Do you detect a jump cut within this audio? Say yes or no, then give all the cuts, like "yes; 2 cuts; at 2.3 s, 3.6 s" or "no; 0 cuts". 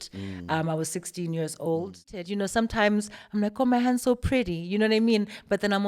yes; 1 cut; at 2.2 s